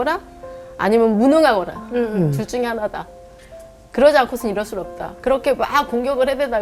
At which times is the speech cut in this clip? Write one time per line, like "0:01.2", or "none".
0:05.1